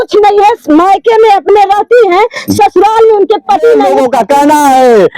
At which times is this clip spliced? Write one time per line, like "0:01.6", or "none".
0:03.9